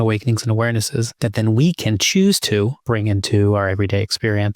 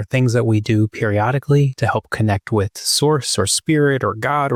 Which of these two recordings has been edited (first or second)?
first